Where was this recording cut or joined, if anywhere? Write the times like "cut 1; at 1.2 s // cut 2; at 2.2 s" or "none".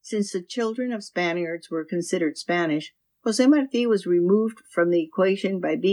none